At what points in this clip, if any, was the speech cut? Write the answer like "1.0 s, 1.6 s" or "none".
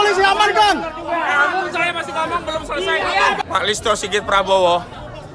3.4 s